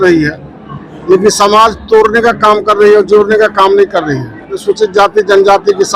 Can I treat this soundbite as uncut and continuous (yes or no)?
no